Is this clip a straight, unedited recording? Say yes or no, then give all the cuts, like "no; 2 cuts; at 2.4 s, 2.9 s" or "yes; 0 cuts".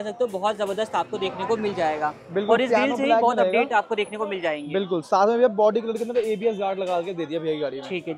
yes; 0 cuts